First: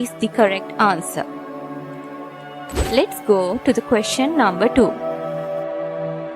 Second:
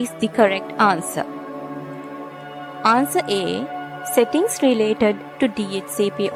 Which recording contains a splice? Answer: first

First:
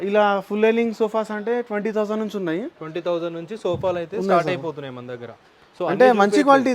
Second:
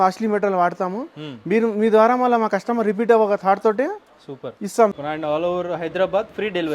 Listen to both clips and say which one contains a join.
second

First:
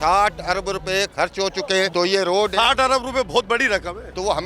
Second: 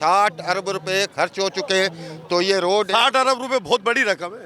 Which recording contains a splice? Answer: first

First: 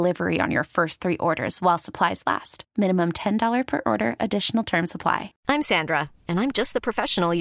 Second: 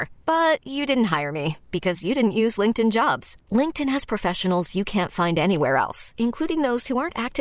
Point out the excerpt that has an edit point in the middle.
first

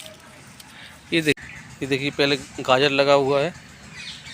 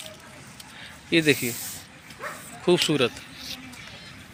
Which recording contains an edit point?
first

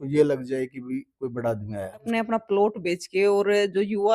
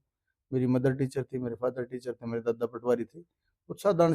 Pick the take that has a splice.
first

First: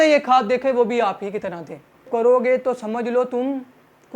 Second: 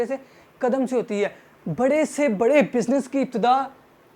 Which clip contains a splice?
first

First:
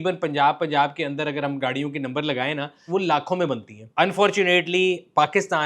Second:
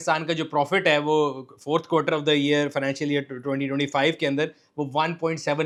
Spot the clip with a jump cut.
first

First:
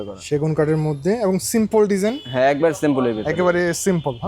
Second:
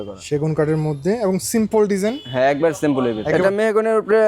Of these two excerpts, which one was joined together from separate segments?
second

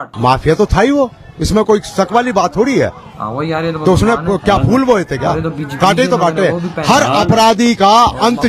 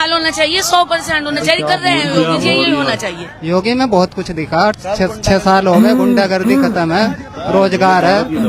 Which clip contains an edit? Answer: second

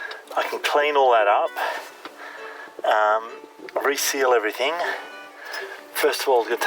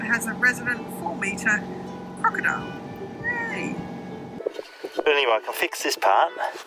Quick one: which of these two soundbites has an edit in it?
second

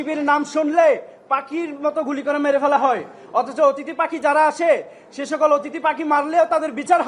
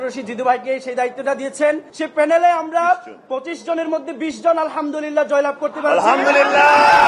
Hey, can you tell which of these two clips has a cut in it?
second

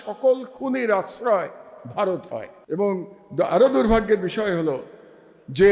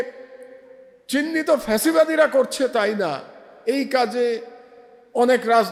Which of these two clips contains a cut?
first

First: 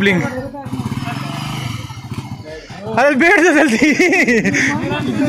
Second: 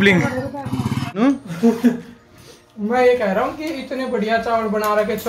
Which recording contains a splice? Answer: second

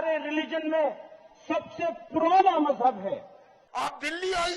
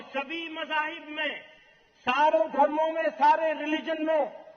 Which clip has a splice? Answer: first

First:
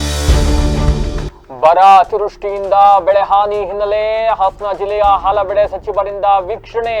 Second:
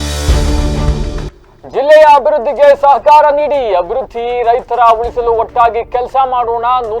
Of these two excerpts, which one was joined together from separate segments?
second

